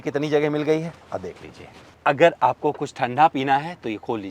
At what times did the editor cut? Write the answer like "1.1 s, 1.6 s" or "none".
1.9 s